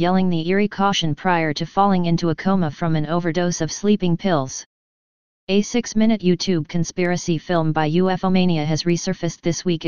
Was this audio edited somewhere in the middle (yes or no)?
yes